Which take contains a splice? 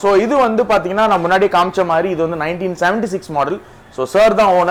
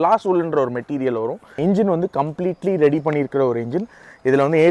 second; 1 cut; at 1.6 s

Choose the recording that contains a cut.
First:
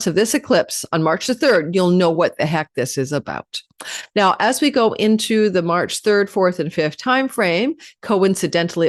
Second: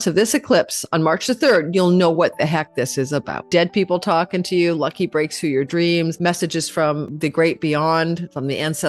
second; 3 cuts; at 3.4 s, 6.2 s, 7.1 s

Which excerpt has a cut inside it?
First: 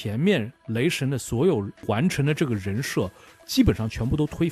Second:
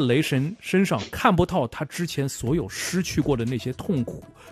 first; 1 cut; at 1.8 s

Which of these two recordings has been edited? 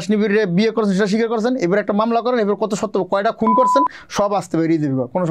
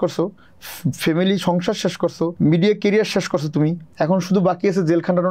second; 2 cuts; at 2.3 s, 3.8 s

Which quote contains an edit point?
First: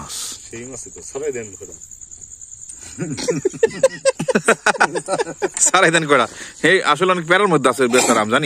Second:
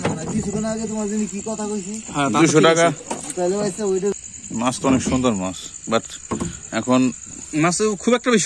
second; 1 cut; at 4.1 s

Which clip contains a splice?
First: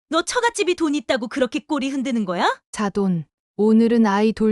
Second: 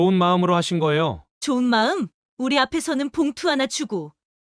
first; 1 cut; at 2.6 s

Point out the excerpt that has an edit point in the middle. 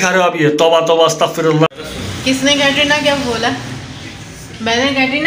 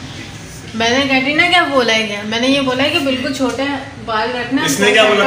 first; 1 cut; at 1.7 s

